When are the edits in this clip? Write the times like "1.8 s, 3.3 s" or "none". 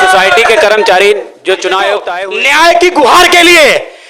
2.1 s